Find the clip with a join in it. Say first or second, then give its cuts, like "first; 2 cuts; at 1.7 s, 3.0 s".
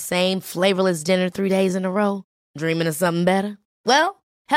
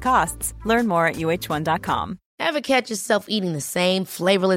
second; 1 cut; at 2.2 s